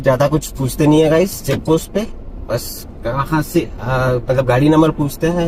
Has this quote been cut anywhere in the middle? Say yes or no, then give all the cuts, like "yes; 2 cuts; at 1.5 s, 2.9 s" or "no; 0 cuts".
no; 0 cuts